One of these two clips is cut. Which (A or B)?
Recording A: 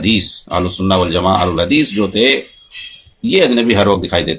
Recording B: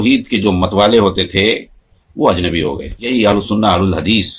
B